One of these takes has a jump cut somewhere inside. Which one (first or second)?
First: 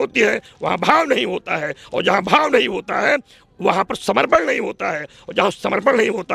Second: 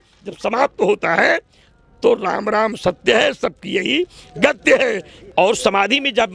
second